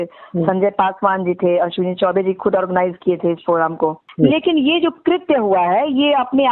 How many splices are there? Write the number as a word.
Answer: one